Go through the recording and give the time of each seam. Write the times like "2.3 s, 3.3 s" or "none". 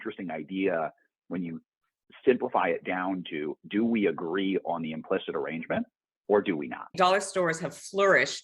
6.9 s